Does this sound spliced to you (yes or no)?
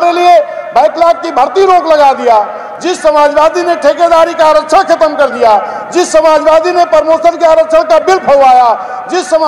no